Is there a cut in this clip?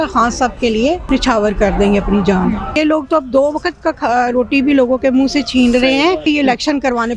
yes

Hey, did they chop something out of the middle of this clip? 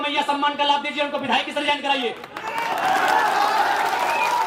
no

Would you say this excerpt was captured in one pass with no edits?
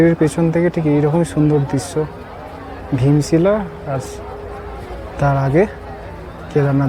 yes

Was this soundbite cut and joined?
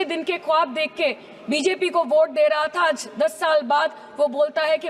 no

